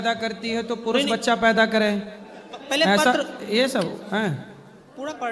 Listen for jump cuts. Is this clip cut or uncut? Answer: uncut